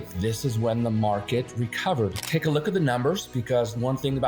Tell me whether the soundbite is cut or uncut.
cut